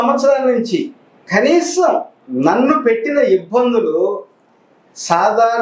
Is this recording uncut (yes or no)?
yes